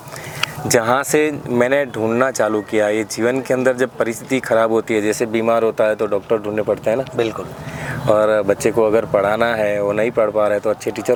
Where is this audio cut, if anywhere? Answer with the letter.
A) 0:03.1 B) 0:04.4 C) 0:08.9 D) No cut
D